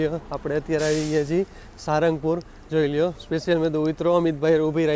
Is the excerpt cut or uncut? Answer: uncut